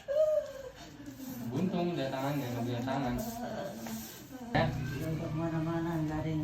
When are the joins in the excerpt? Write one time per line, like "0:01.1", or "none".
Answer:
0:04.5